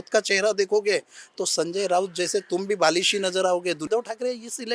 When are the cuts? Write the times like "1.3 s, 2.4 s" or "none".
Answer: 3.8 s